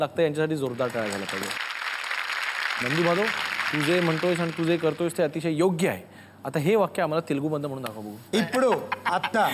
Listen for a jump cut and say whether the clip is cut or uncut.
cut